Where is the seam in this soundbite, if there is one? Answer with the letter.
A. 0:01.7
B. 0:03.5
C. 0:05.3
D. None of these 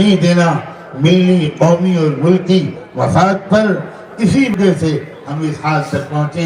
D